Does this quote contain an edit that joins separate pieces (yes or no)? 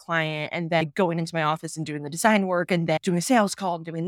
yes